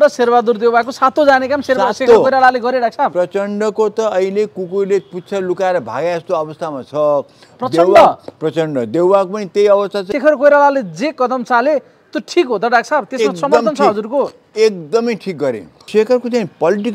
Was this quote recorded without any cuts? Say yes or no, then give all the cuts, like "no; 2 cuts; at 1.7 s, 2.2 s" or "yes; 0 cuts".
no; 2 cuts; at 10.1 s, 15.9 s